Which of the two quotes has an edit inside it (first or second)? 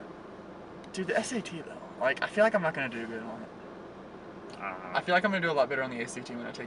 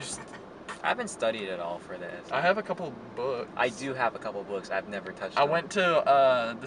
second